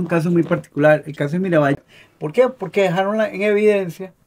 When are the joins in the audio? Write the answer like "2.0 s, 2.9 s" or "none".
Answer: 1.8 s